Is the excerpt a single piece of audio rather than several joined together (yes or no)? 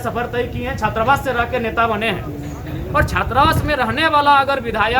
yes